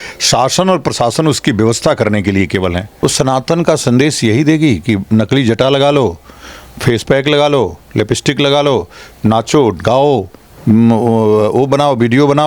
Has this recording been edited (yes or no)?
yes